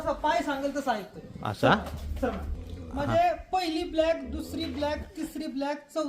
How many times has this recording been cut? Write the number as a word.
one